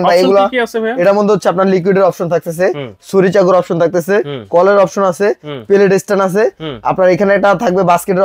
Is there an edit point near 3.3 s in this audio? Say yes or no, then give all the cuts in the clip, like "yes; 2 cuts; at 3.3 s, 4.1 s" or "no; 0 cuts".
no; 0 cuts